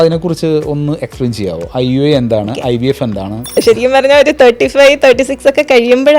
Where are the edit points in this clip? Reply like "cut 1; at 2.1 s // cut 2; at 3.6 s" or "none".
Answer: cut 1; at 3.5 s